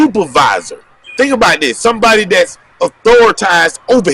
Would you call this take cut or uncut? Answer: cut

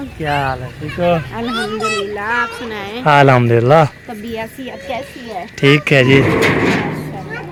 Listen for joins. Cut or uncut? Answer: uncut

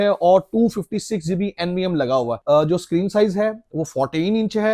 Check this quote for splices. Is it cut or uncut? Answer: uncut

